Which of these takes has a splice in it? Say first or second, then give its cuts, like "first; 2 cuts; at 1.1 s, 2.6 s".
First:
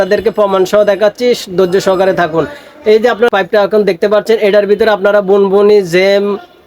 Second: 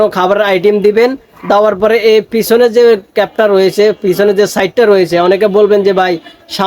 first; 1 cut; at 3.3 s